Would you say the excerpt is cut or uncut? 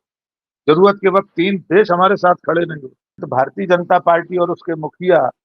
cut